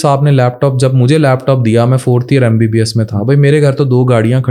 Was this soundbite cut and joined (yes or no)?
no